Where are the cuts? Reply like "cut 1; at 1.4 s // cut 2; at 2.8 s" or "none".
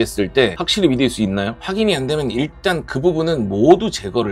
cut 1; at 1.5 s

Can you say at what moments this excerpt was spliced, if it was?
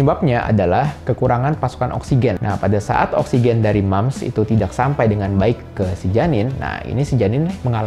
cut 1; at 2.4 s

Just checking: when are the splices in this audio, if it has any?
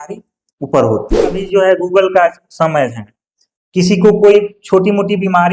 cut 1; at 1.4 s

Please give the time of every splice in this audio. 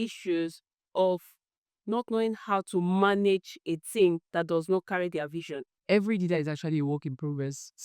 cut 1; at 5.7 s

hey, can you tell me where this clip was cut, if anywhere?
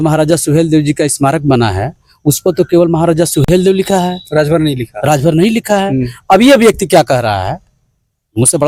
none

